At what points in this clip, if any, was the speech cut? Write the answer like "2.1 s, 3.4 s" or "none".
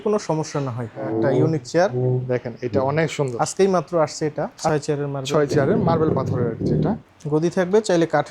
0.9 s, 4.7 s, 7.1 s